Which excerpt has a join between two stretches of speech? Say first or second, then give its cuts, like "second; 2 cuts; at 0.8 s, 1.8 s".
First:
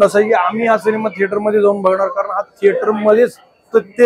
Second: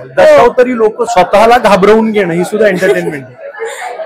second; 1 cut; at 1.0 s